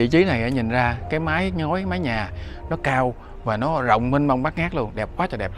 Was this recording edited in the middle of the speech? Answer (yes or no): no